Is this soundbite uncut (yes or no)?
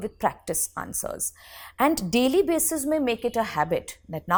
yes